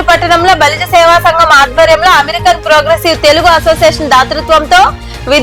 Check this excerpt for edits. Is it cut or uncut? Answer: uncut